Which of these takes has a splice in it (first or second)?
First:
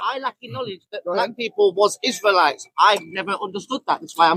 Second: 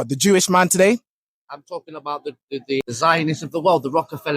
second